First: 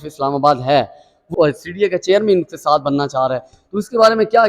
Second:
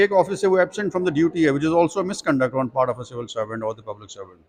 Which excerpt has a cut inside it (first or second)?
first